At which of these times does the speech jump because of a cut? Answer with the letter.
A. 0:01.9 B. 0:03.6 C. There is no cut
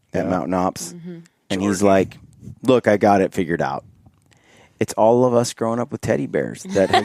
C